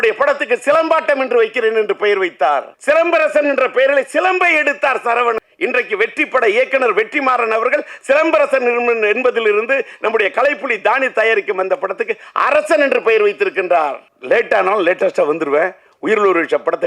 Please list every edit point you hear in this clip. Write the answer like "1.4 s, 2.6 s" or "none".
2.7 s, 5.4 s, 14.1 s

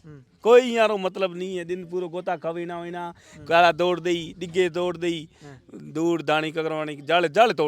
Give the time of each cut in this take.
none

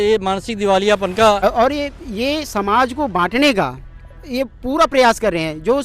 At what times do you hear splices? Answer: 1.4 s

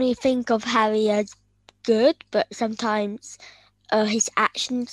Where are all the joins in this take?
none

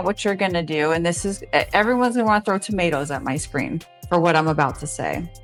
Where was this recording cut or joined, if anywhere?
none

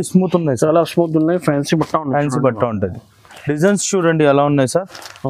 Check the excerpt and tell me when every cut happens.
3.3 s

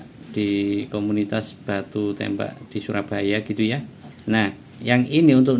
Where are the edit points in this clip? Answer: 2.6 s, 4.4 s

